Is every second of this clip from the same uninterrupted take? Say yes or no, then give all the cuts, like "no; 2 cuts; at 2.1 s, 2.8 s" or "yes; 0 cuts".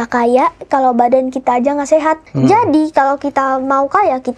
no; 1 cut; at 2.3 s